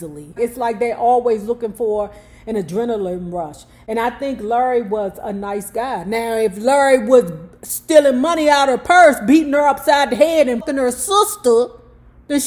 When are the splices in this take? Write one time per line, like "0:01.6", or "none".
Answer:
0:10.6